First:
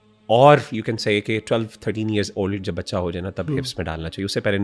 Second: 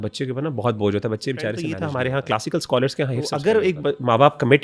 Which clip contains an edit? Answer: second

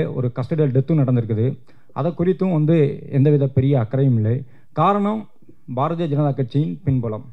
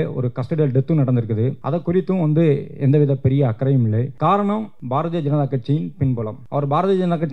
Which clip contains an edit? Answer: second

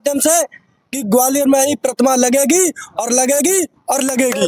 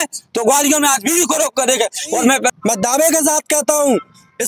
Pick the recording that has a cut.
second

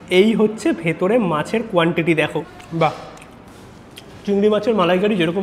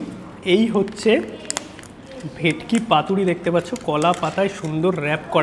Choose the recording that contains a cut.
first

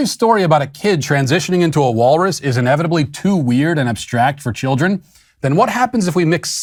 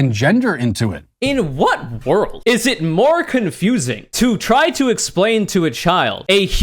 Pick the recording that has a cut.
second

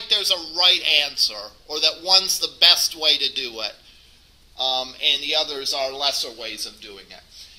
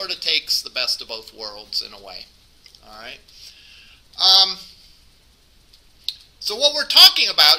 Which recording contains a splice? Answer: second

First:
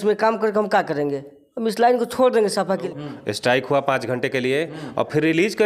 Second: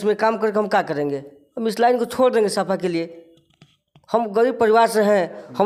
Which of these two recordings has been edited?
first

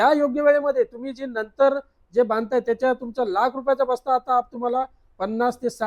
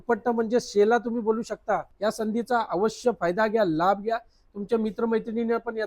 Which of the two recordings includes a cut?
second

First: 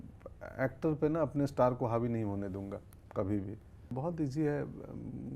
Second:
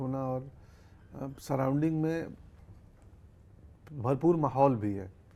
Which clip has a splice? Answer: first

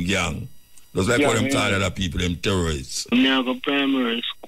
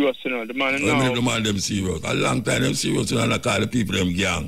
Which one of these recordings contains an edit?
first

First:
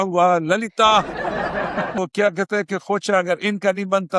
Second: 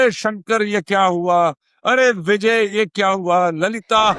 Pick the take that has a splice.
first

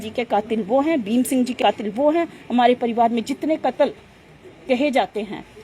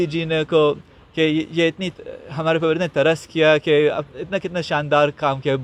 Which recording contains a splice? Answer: first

